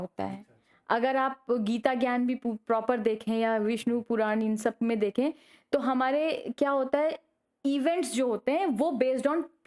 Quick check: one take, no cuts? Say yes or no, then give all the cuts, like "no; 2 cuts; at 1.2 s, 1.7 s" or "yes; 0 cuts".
yes; 0 cuts